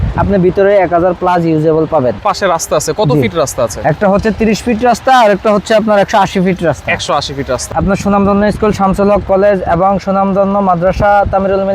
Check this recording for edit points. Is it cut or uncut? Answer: cut